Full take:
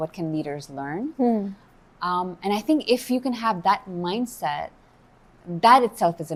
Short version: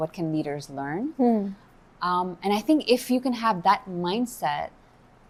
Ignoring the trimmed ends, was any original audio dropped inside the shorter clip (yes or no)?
no